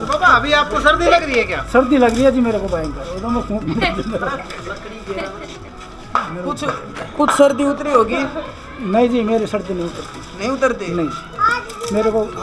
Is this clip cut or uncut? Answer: uncut